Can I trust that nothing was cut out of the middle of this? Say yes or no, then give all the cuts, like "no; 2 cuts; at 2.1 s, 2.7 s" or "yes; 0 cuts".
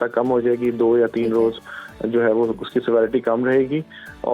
yes; 0 cuts